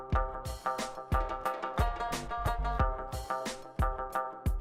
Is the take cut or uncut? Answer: uncut